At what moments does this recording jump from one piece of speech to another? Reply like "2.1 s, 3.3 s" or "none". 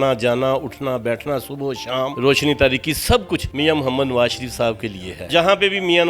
2.1 s, 3.5 s, 5.3 s